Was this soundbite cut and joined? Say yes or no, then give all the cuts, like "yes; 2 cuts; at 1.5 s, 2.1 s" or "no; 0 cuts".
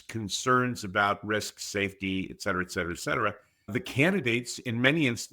yes; 1 cut; at 3.7 s